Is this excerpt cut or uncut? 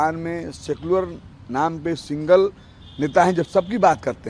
uncut